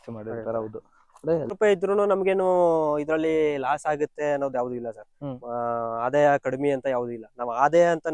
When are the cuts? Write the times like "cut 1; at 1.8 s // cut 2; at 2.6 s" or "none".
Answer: cut 1; at 1.5 s